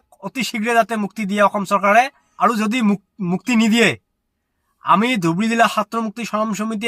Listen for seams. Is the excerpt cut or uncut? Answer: cut